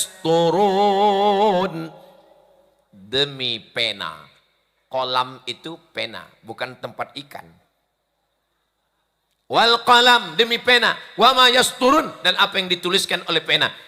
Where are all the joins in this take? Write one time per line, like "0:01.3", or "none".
none